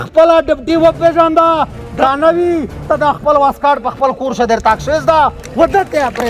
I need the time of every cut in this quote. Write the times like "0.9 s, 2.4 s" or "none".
1.9 s